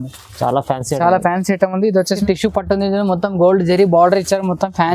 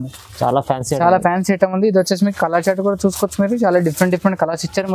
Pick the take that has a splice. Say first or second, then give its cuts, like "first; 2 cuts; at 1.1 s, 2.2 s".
first; 1 cut; at 2.2 s